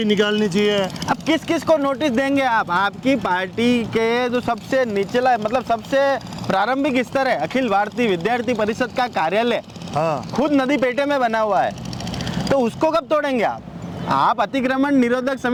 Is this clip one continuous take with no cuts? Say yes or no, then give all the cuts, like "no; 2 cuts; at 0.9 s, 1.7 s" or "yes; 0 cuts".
yes; 0 cuts